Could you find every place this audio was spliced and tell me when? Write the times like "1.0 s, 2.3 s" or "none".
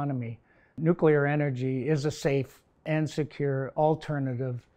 0.7 s, 2.9 s